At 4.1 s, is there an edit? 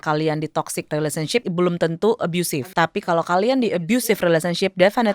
no; 2 cuts; at 1.2 s, 2.7 s

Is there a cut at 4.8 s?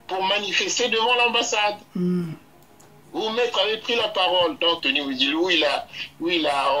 yes; 1 cut; at 4.8 s

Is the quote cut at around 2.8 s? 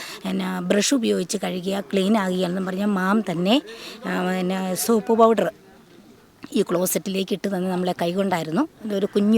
no; 0 cuts

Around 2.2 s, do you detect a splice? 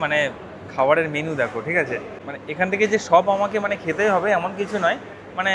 yes; 1 cut; at 2.2 s

